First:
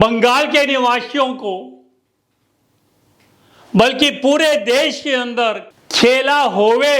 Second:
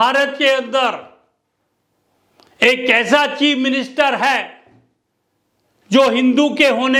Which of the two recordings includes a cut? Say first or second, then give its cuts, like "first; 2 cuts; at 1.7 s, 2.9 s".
first; 1 cut; at 5.7 s